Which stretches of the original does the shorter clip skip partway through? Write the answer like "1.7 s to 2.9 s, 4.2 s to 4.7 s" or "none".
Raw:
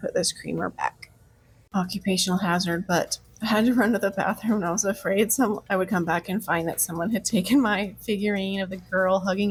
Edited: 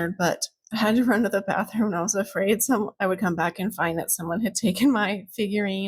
none